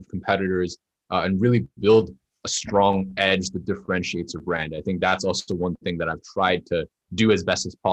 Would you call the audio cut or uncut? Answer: uncut